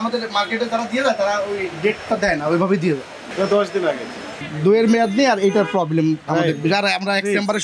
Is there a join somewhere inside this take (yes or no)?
yes